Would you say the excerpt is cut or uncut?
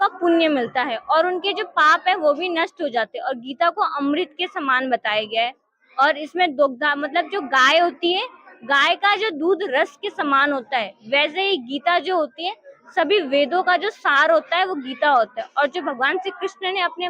uncut